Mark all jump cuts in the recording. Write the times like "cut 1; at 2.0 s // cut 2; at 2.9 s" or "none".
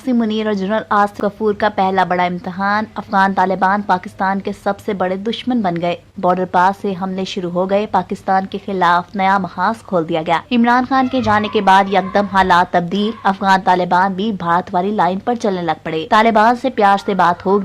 cut 1; at 1.1 s